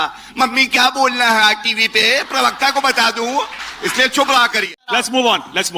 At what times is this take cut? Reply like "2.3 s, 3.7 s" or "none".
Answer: 3.6 s, 4.9 s